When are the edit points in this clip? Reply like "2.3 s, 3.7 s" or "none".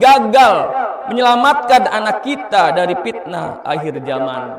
none